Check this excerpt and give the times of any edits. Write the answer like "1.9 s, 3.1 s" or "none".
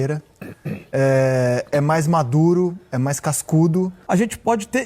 4.0 s